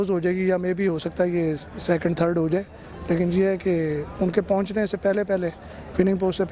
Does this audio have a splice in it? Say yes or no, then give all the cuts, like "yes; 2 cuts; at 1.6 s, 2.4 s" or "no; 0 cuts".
no; 0 cuts